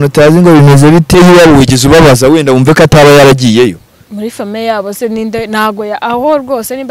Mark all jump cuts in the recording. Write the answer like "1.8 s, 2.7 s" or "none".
1.2 s